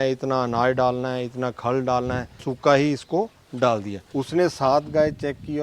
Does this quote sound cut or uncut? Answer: cut